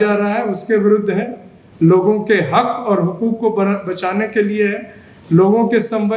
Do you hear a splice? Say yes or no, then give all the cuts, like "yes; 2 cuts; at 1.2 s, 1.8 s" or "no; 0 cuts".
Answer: no; 0 cuts